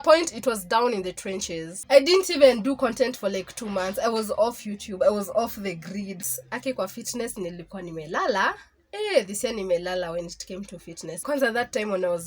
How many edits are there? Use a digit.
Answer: 3